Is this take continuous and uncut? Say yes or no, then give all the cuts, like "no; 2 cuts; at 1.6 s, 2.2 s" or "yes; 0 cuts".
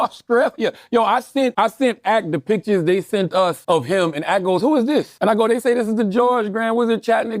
yes; 0 cuts